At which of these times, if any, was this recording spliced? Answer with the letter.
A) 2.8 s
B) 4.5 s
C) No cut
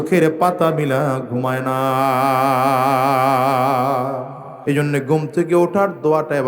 B